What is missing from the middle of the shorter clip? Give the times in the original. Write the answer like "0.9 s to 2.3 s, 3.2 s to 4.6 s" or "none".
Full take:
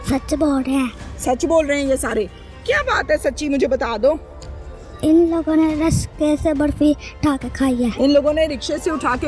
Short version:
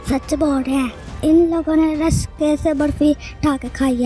1.0 s to 4.8 s